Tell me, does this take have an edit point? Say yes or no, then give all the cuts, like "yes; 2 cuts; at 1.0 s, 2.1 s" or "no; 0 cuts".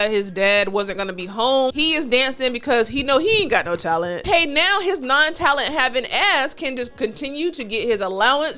yes; 2 cuts; at 1.7 s, 4.2 s